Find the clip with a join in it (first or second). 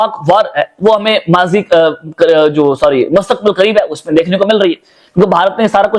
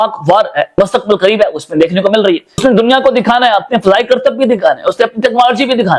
second